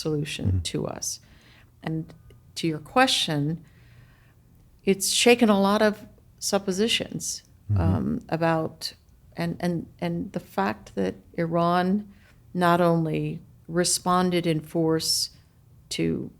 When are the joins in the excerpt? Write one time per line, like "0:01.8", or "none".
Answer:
0:01.9